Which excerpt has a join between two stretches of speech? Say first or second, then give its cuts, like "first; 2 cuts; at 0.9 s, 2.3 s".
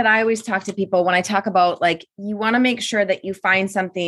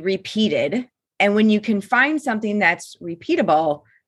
second; 1 cut; at 1.0 s